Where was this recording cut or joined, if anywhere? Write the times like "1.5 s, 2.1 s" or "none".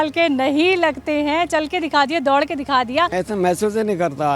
3.1 s

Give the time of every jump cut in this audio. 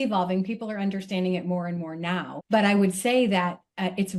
2.3 s

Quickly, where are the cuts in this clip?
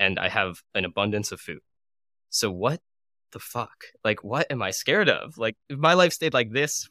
4.2 s, 5.6 s

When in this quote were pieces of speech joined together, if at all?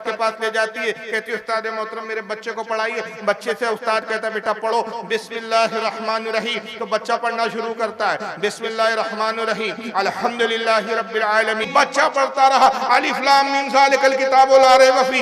11.6 s

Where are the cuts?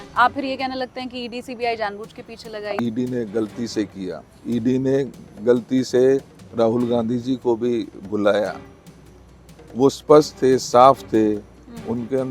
2.8 s

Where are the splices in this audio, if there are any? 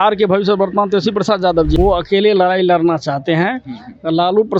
1.7 s

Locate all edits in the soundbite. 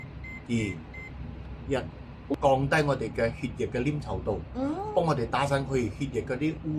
2.3 s

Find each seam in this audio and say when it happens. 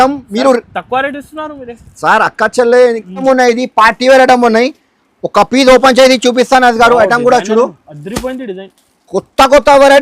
3.2 s

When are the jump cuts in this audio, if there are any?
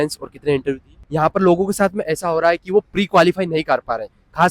0.9 s

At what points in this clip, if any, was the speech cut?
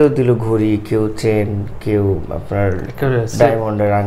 none

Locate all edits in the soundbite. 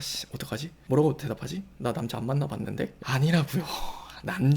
2.9 s

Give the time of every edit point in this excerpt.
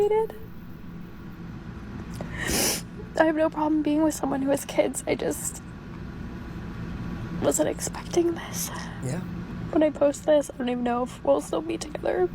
9.1 s

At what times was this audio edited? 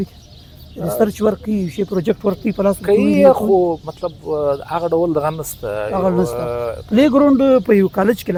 none

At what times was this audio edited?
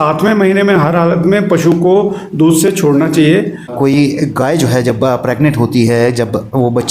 3.7 s

